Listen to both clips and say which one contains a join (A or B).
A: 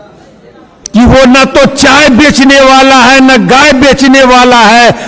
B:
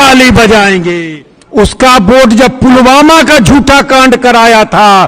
B